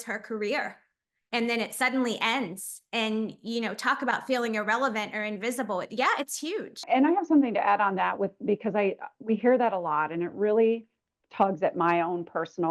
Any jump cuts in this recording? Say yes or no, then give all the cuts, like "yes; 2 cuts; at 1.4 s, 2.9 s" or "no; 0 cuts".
no; 0 cuts